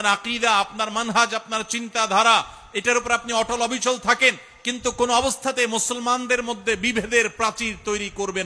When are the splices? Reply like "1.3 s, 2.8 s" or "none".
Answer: none

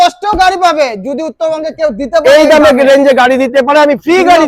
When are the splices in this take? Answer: none

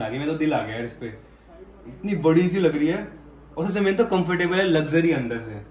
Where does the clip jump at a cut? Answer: none

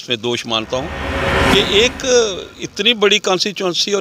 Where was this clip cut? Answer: 1.5 s

